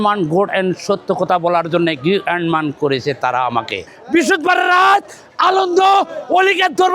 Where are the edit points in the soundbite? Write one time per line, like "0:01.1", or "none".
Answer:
0:03.9